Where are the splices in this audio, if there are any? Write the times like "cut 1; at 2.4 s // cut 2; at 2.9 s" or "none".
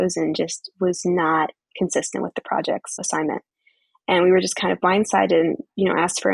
none